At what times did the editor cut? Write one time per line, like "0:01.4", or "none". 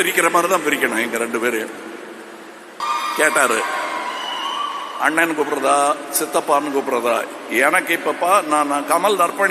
0:02.8